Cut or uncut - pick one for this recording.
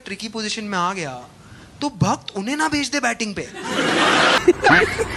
cut